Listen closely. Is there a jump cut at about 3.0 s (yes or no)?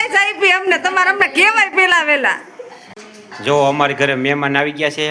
yes